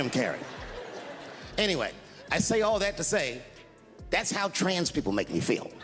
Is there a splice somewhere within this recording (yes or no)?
no